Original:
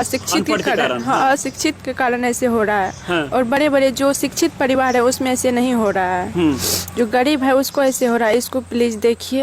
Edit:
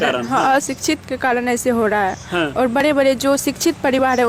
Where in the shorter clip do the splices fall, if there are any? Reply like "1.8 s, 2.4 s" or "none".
none